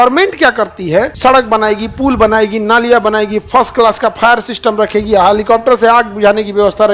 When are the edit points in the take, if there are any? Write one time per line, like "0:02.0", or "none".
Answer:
0:01.1